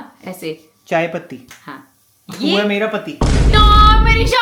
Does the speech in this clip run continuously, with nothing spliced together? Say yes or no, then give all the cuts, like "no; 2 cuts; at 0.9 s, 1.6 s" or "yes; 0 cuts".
yes; 0 cuts